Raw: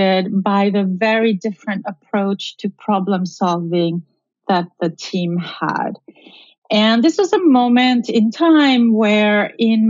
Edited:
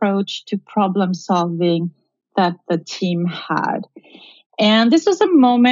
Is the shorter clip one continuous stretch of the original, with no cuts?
yes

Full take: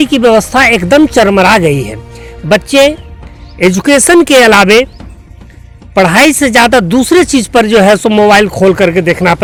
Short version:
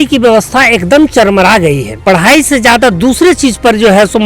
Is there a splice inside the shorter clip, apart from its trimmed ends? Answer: yes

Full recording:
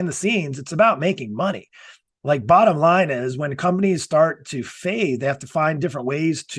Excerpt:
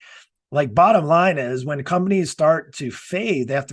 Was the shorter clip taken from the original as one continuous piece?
yes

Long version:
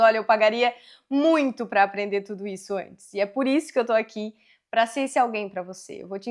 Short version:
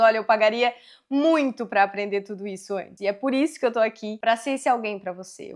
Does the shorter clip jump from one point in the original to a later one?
yes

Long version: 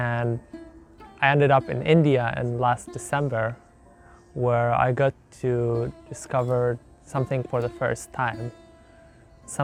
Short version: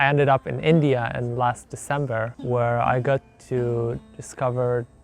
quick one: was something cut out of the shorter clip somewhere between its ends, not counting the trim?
yes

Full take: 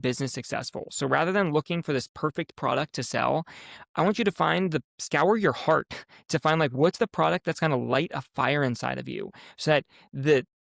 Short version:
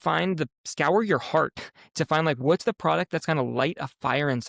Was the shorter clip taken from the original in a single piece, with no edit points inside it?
yes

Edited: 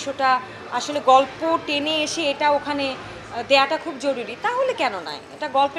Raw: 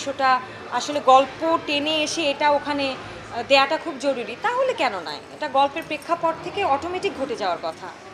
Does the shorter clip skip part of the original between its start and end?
no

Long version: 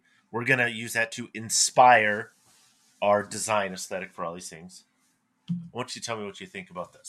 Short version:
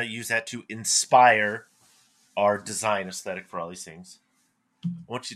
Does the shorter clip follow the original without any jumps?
yes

